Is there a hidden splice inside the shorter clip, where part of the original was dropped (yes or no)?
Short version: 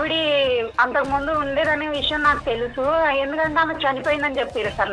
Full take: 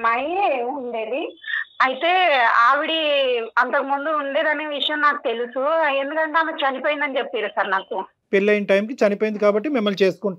no